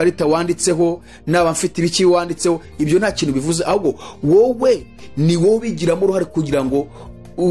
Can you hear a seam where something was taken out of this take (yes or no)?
no